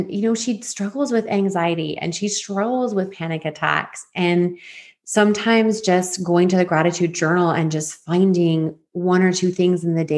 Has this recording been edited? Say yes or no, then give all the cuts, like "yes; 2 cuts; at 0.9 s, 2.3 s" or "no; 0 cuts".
no; 0 cuts